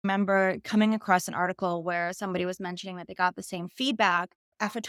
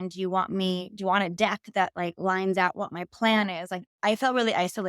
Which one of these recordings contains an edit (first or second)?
second